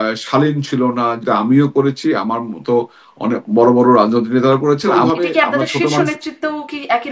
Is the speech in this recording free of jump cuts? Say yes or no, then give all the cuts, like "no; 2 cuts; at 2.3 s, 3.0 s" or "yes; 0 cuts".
no; 2 cuts; at 1.2 s, 4.9 s